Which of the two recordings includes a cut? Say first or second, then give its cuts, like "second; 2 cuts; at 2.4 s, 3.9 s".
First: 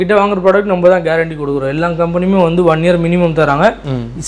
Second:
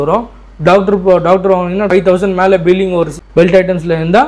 second; 2 cuts; at 1.9 s, 3.2 s